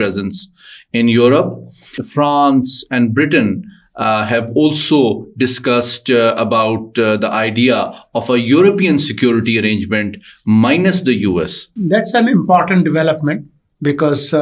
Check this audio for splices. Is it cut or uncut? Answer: cut